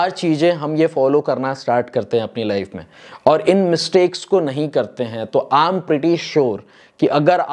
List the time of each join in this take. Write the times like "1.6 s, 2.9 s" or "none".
none